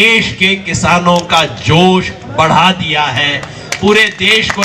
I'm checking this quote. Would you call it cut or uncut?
uncut